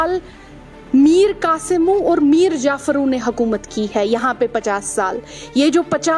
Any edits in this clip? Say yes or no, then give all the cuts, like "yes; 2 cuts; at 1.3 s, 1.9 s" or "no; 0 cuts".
no; 0 cuts